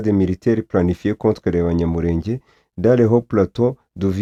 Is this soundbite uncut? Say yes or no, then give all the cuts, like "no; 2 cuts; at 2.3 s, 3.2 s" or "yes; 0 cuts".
yes; 0 cuts